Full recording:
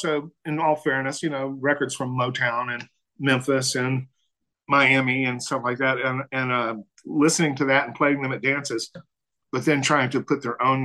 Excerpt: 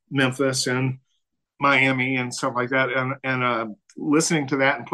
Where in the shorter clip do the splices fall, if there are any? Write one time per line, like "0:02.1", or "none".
none